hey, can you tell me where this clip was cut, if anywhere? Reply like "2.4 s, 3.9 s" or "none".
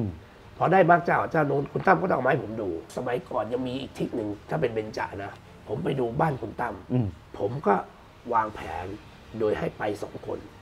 2.9 s, 5.3 s, 7.2 s